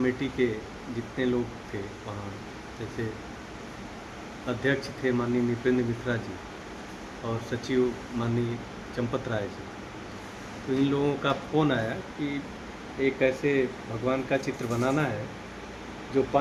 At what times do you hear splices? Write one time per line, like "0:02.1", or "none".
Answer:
none